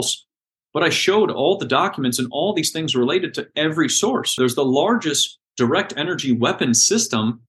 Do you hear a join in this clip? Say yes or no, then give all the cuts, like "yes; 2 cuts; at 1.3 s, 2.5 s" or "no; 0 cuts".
yes; 1 cut; at 4.4 s